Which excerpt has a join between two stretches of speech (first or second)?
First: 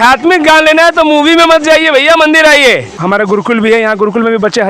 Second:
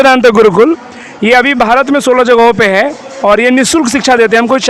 first